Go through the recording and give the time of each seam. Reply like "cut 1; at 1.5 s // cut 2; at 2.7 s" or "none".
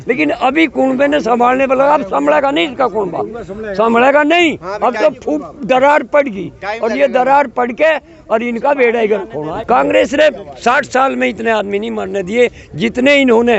cut 1; at 9.4 s

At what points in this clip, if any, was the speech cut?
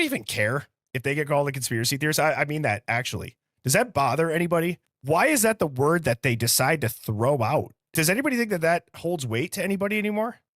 cut 1; at 4.9 s // cut 2; at 7.8 s

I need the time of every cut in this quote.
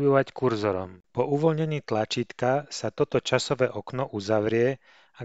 cut 1; at 1.0 s

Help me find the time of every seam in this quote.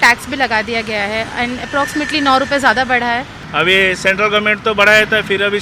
cut 1; at 3.4 s

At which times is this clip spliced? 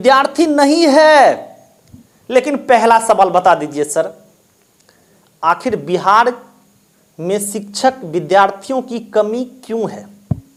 none

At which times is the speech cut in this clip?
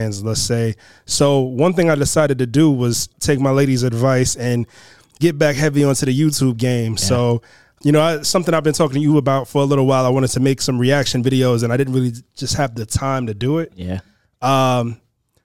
cut 1; at 3.1 s // cut 2; at 7.8 s

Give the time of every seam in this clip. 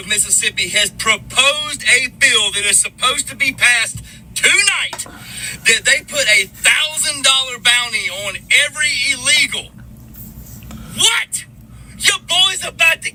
none

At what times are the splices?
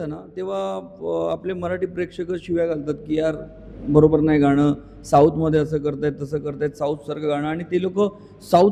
none

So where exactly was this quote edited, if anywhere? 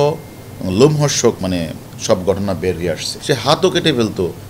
cut 1; at 1.4 s // cut 2; at 3.1 s

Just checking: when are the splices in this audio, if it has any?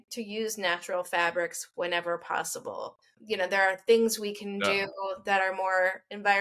cut 1; at 3.1 s

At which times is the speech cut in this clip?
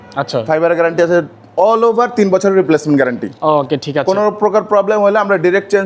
none

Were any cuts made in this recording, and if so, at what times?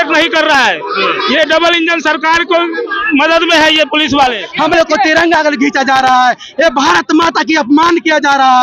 cut 1; at 4.5 s

